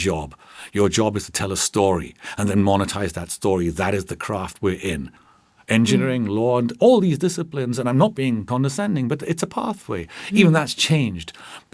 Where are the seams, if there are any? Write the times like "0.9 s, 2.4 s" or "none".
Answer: 8.5 s